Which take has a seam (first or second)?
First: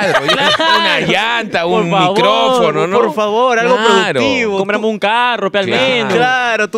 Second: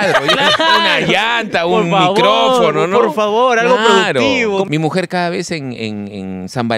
second